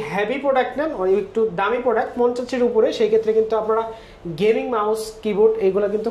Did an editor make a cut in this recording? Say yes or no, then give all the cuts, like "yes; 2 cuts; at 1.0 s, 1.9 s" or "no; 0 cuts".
no; 0 cuts